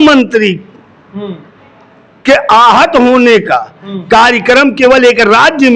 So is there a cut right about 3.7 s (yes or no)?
no